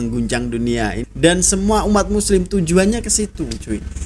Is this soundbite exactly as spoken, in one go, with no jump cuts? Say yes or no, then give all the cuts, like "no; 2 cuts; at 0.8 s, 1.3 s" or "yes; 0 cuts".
no; 1 cut; at 1.0 s